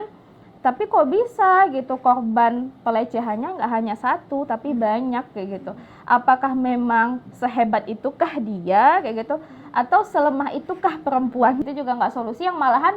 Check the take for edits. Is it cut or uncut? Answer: cut